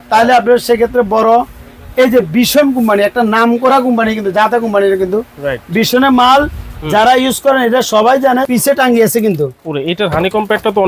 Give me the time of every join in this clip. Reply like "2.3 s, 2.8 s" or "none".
8.5 s

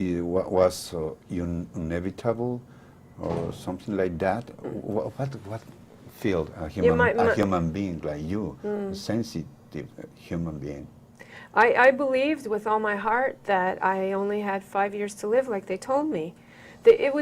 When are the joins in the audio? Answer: 14.9 s

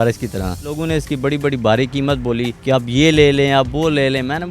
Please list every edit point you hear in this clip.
0.8 s, 2.6 s

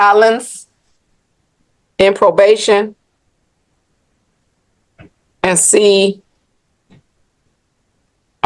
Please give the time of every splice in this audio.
none

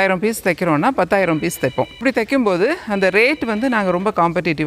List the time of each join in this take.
2.0 s

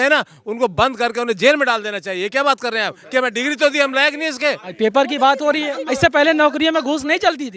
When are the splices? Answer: 4.7 s

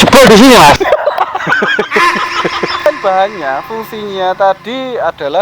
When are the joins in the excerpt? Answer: 2.9 s

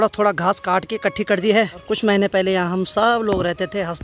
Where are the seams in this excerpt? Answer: 1.8 s

